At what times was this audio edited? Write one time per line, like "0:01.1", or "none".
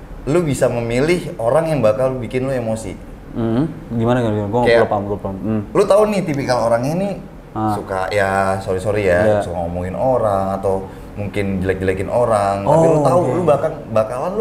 none